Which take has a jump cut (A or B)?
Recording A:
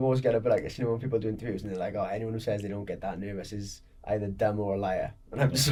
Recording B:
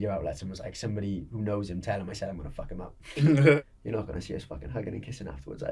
B